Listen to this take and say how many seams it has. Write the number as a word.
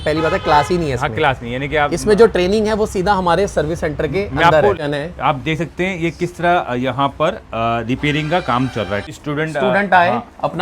two